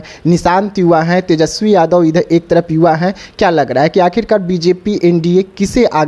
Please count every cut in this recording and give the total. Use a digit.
0